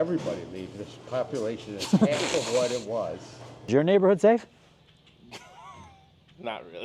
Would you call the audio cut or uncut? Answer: cut